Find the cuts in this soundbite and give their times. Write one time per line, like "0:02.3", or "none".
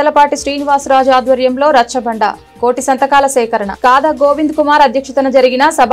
none